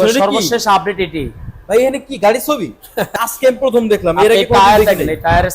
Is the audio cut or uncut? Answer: cut